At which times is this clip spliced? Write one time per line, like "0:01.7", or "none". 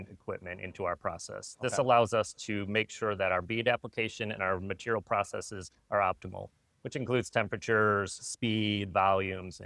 none